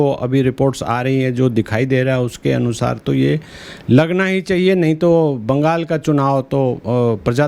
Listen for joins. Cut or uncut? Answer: uncut